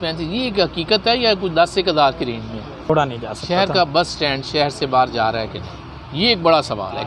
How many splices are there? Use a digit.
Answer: 1